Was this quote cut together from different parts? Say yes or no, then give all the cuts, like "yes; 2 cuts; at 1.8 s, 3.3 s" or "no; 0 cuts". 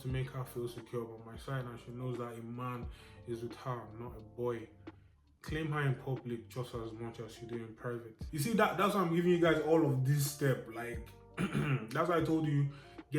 yes; 1 cut; at 8.3 s